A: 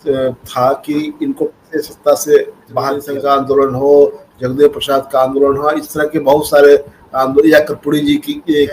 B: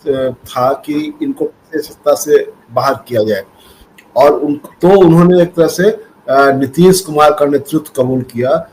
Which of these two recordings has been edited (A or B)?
A